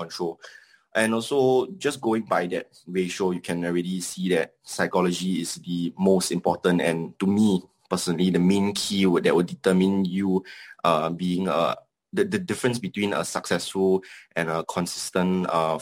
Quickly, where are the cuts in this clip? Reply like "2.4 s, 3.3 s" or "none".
none